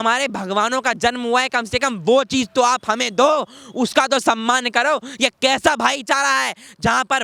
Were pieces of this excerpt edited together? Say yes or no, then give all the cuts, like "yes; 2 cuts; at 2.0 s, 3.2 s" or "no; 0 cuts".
no; 0 cuts